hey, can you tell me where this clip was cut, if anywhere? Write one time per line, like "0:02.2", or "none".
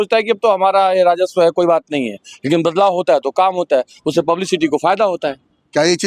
none